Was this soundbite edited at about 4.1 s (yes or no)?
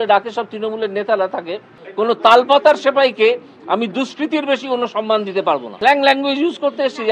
no